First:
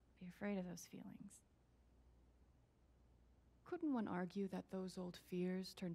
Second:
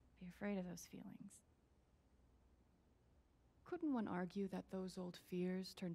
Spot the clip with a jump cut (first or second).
first